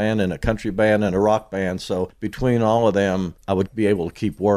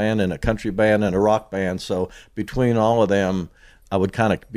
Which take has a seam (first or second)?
first